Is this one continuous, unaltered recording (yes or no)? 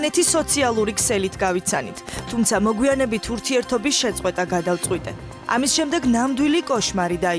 yes